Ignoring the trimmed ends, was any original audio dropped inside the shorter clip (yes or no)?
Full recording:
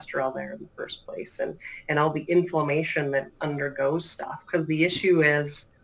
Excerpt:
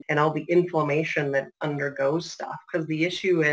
no